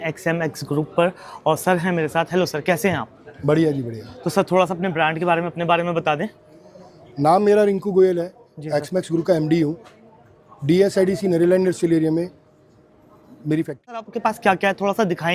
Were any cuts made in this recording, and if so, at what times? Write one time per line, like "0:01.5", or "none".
0:14.1

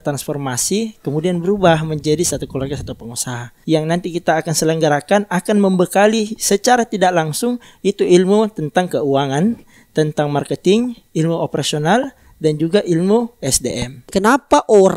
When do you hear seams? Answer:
0:03.5
0:14.0

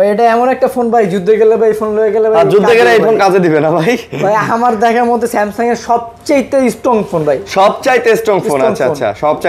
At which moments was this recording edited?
none

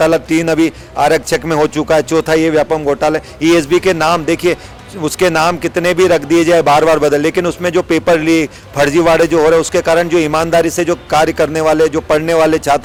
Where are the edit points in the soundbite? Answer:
none

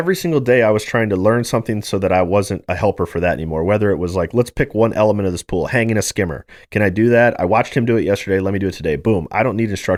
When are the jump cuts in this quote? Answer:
none

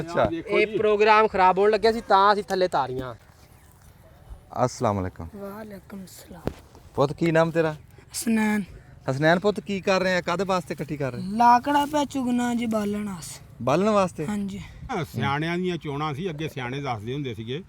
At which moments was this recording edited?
0:03.2
0:14.9

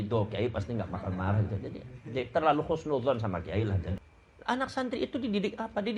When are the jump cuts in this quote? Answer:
0:04.0

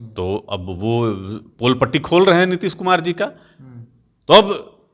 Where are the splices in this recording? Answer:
none

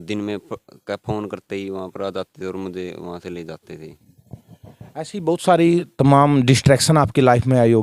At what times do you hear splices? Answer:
none

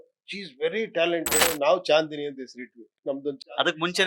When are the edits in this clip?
0:01.4

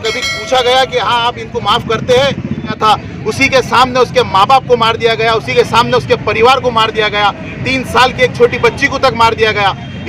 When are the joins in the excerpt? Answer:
0:02.7

